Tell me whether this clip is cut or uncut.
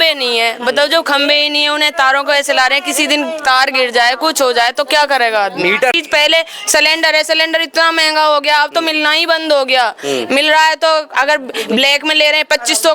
cut